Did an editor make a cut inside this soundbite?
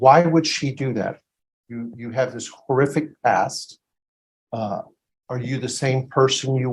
no; 0 cuts

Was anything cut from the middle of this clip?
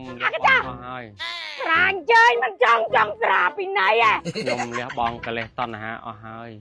no; 0 cuts

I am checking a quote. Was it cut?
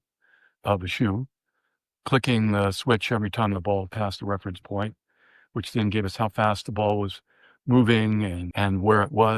yes; 1 cut; at 8.4 s

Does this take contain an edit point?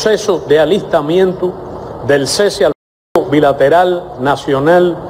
no; 0 cuts

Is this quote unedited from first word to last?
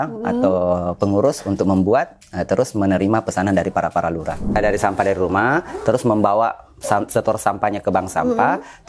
no; 1 cut; at 4.6 s

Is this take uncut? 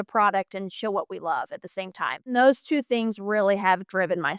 yes; 0 cuts

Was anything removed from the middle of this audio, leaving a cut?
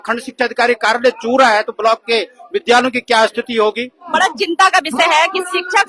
yes; 1 cut; at 4.1 s

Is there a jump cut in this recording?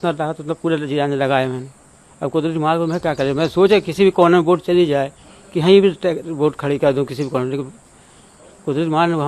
no; 0 cuts

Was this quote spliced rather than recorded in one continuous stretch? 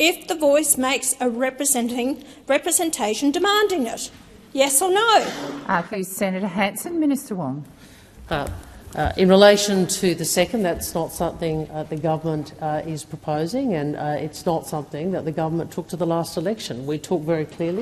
yes; 1 cut; at 5.9 s

